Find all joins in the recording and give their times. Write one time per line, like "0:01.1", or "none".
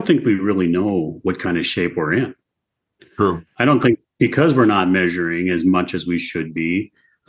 none